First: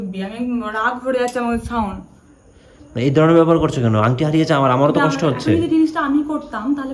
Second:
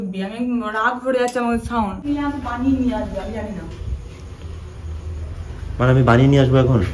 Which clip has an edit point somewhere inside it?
second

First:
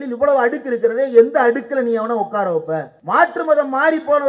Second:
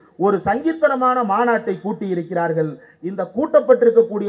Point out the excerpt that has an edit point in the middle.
first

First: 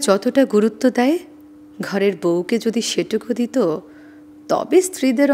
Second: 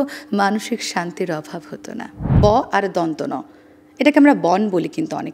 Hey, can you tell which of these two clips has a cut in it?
second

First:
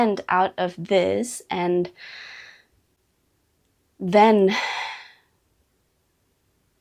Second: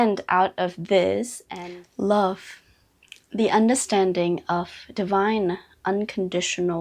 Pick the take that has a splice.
second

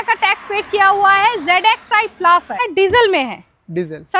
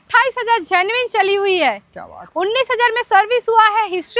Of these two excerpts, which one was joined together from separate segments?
first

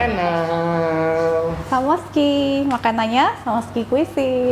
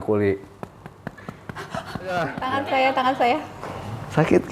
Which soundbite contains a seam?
second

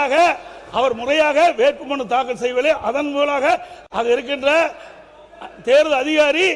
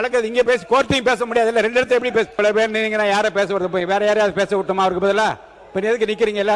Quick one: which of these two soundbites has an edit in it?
second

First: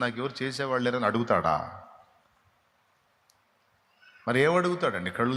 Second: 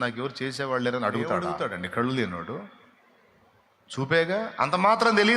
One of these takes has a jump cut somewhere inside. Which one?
second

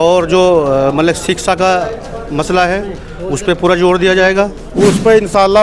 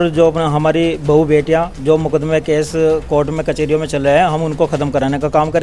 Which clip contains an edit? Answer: first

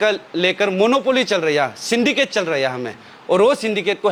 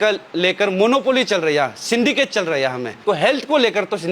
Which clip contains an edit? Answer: second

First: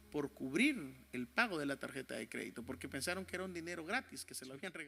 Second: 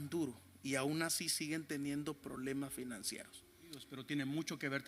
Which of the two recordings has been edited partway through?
second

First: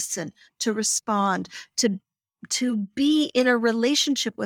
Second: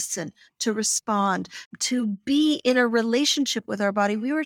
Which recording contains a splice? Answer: second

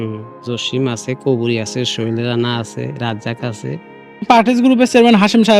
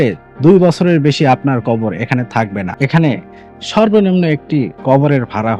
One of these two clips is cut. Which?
second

